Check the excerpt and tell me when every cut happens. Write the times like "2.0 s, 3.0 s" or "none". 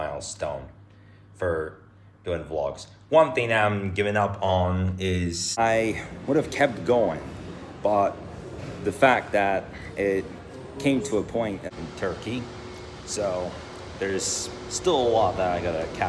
5.6 s, 11.6 s